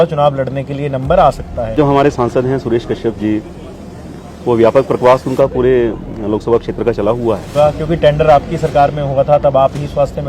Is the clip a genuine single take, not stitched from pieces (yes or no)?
no